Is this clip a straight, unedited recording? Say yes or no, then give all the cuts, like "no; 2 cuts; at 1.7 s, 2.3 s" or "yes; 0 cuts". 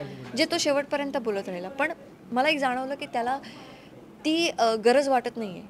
yes; 0 cuts